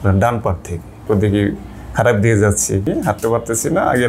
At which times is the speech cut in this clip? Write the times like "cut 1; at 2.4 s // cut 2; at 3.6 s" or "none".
cut 1; at 0.9 s // cut 2; at 2.9 s